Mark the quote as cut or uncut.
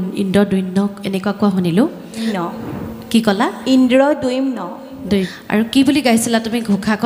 cut